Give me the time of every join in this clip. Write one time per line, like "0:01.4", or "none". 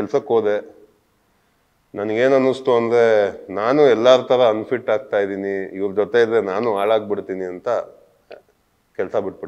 none